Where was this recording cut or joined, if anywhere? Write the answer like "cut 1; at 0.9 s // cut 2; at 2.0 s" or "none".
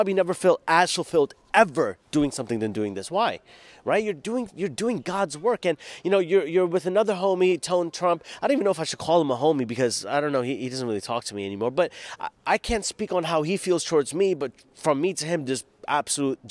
none